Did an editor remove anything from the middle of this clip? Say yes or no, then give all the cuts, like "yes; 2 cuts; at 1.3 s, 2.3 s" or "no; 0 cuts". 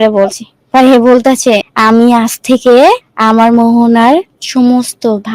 yes; 3 cuts; at 1.7 s, 3.1 s, 4.4 s